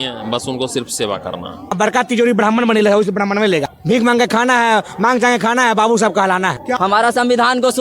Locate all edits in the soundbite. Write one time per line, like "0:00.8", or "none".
0:01.8
0:06.7